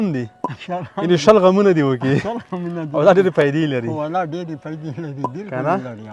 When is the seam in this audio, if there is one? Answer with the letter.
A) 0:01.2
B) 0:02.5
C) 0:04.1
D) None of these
D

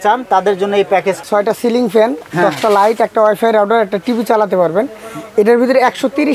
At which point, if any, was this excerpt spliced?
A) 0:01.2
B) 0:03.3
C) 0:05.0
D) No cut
A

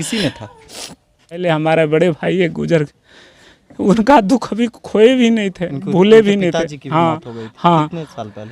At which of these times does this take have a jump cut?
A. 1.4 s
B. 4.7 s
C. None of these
A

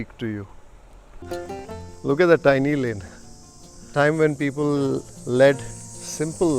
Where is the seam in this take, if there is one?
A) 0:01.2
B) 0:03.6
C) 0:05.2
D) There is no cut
A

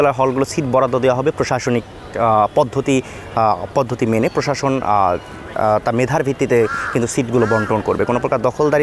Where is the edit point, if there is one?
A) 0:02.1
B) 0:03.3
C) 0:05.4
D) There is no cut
D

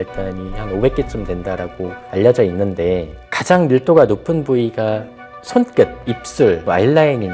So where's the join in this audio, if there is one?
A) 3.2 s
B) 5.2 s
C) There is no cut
A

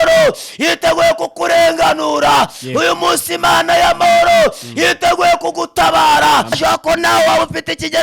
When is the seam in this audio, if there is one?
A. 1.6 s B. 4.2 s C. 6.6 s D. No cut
C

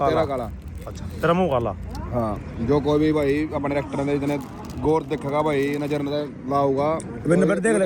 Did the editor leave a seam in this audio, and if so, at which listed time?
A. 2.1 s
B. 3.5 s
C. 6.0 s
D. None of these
D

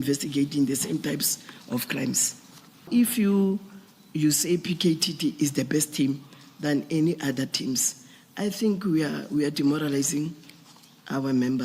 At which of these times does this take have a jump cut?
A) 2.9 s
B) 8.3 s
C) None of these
A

